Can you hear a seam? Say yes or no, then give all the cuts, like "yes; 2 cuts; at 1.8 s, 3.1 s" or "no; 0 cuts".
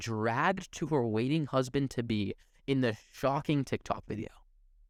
no; 0 cuts